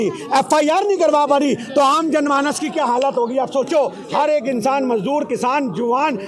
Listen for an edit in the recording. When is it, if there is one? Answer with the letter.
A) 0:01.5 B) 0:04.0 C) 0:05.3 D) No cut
B